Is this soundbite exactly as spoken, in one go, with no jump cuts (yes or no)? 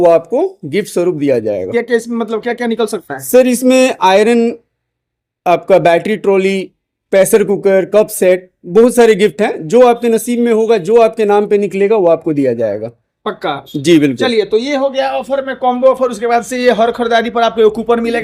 yes